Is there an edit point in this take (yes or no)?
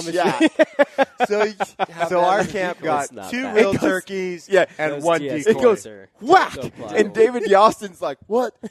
no